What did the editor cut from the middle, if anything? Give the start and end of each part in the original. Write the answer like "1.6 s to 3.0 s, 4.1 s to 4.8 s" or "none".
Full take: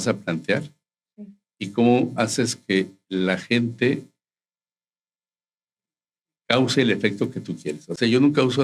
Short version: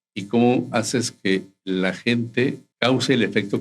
4.1 s to 6.3 s